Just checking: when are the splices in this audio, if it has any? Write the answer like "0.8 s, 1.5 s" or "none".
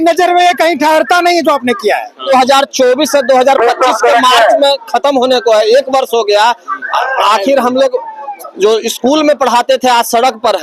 2.2 s